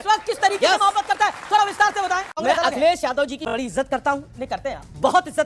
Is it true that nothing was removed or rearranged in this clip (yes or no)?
no